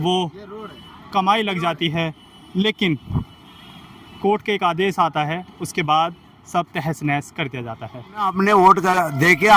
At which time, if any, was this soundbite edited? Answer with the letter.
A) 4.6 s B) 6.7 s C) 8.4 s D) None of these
C